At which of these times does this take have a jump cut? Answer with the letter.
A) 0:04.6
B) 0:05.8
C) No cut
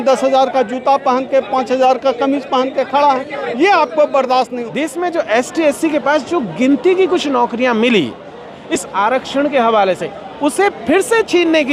A